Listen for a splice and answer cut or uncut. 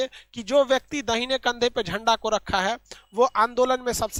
uncut